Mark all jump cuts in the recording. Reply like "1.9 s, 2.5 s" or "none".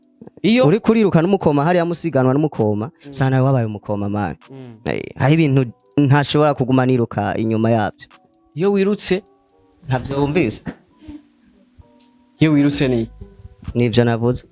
none